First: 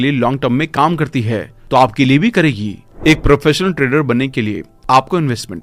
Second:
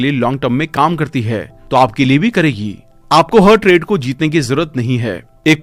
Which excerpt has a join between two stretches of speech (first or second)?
first